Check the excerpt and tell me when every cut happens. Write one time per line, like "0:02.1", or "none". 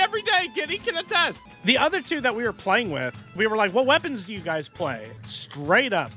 0:01.4
0:03.3
0:05.1